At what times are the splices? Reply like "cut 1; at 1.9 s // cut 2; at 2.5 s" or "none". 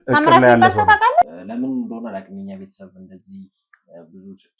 cut 1; at 1.2 s